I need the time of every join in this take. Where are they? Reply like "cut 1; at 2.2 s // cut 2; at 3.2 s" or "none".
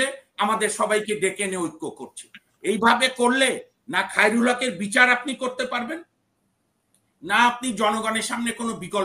none